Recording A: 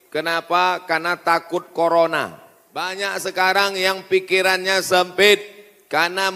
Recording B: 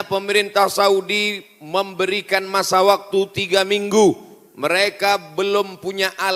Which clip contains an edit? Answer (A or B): A